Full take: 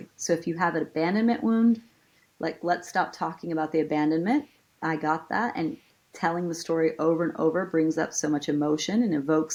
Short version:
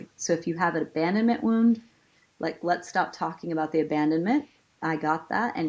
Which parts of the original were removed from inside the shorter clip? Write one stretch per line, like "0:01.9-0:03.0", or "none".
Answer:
none